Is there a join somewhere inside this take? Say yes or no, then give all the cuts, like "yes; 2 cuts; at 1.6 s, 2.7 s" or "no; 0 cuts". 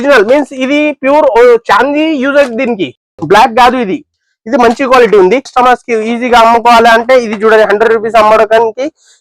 yes; 1 cut; at 5.5 s